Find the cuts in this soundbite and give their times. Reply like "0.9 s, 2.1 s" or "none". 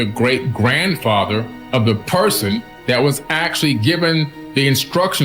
1.6 s, 2.7 s, 4.4 s